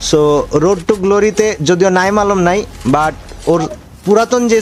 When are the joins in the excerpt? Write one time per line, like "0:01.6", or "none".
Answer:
none